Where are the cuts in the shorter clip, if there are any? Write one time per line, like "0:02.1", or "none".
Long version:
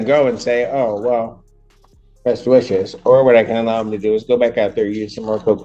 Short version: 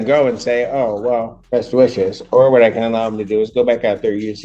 0:01.4